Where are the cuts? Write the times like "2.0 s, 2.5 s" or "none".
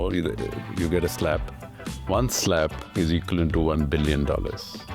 2.8 s